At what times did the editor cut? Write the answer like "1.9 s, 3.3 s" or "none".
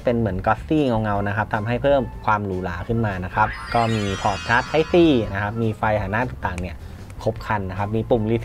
3.7 s